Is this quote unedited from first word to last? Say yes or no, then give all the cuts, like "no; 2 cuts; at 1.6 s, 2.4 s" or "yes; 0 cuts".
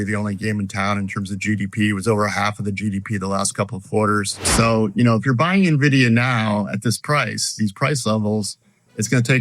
no; 1 cut; at 4.4 s